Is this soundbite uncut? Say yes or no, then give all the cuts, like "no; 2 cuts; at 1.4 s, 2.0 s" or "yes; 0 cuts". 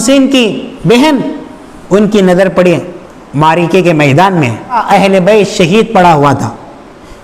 no; 1 cut; at 4.8 s